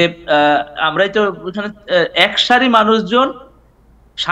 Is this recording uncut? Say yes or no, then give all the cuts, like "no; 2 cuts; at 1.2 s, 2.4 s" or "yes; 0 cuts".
yes; 0 cuts